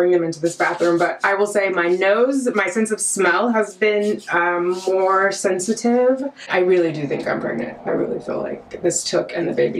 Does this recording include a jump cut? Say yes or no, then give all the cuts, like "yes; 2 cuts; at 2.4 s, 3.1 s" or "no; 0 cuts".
yes; 1 cut; at 6.4 s